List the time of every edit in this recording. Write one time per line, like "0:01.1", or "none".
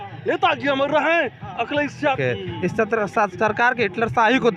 0:02.2